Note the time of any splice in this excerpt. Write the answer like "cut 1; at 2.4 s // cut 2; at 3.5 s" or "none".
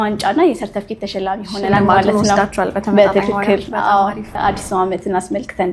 cut 1; at 4.3 s